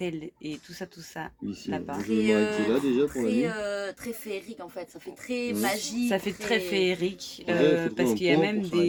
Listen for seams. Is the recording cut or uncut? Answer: uncut